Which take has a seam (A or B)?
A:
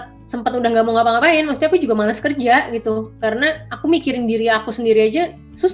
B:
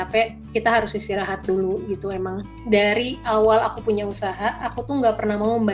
B